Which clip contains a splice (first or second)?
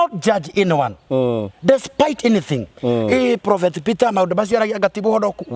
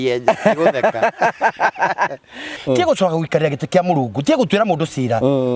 second